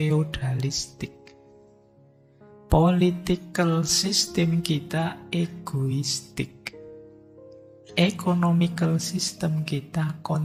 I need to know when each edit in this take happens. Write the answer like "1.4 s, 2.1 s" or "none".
none